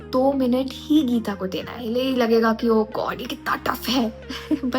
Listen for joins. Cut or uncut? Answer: cut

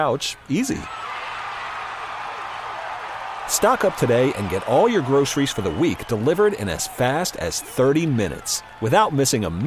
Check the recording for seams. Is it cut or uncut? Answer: uncut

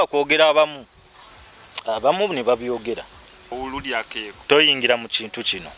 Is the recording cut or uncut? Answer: cut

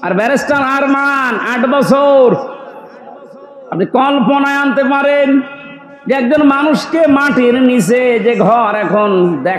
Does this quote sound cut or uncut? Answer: uncut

